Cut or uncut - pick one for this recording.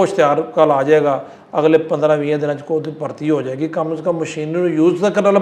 uncut